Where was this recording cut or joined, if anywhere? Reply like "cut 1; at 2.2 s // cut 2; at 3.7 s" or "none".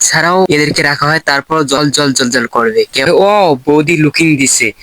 cut 1; at 3.1 s